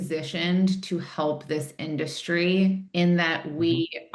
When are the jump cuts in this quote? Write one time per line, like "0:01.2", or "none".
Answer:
none